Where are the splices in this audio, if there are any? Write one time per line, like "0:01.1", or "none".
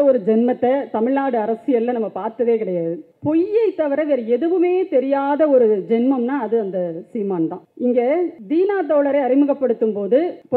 none